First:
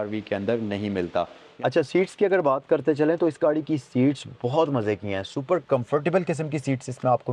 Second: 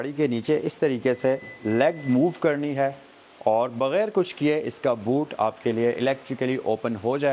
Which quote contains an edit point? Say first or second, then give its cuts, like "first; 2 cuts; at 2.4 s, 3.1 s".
first; 1 cut; at 1.4 s